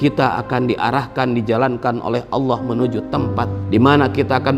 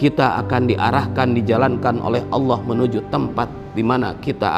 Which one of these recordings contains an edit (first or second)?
first